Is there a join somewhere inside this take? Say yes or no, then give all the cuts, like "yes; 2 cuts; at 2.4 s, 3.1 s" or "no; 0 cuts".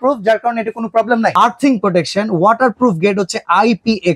yes; 1 cut; at 1.3 s